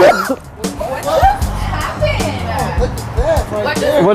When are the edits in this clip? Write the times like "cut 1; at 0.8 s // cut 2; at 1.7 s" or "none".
cut 1; at 2.9 s